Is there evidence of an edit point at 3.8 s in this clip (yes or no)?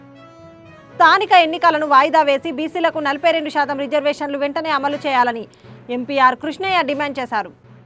no